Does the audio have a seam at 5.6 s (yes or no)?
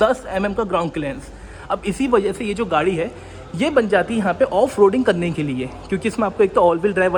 no